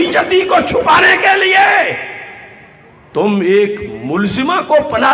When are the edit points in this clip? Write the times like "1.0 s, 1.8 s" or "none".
none